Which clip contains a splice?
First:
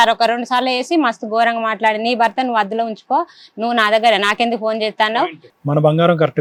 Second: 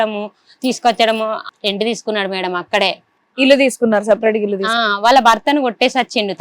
second; 1 cut; at 1.4 s

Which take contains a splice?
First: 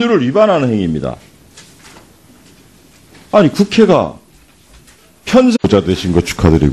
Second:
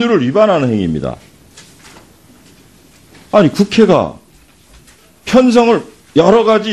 second; 1 cut; at 5.6 s

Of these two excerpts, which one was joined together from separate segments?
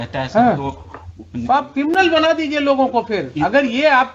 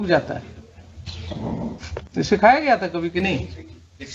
second; 1 cut; at 2.1 s

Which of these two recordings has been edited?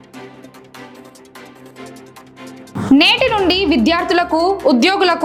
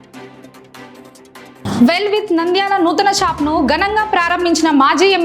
second; 1 cut; at 1.6 s

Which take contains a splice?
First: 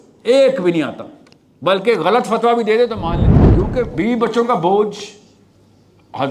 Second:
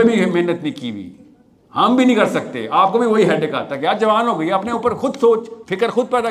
first; 1 cut; at 3.3 s

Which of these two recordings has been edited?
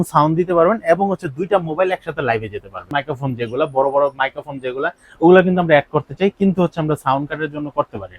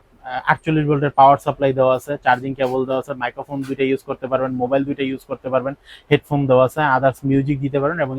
first; 1 cut; at 2.9 s

